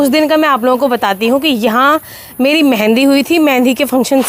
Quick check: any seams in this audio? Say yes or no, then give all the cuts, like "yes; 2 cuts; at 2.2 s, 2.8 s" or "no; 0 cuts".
no; 0 cuts